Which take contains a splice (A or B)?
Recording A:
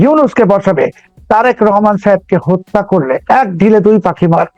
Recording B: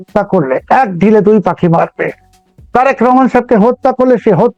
A